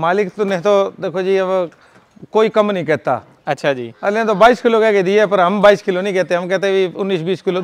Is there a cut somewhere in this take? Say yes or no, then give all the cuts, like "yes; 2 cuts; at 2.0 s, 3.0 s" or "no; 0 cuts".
no; 0 cuts